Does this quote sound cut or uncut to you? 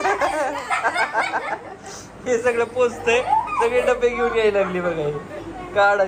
uncut